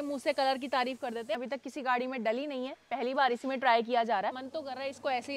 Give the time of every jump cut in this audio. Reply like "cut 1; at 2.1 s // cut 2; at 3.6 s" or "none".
cut 1; at 1.4 s // cut 2; at 4.5 s